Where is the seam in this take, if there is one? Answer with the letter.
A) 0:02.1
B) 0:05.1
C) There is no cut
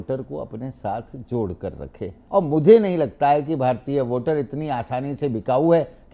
A